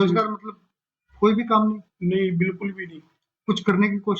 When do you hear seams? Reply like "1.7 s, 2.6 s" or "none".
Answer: none